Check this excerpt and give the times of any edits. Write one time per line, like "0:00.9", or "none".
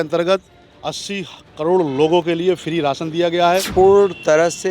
0:03.7